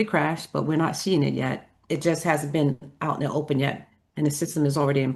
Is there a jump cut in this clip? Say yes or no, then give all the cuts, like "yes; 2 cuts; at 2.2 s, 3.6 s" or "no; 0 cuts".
no; 0 cuts